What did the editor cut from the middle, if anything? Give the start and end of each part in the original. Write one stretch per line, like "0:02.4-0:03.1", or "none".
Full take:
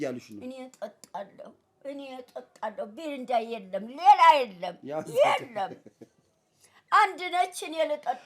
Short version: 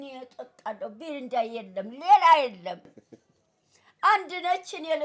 0:04.8-0:05.8